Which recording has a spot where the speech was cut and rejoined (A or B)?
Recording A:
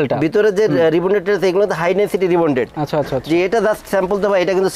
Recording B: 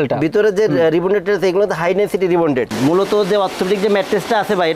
B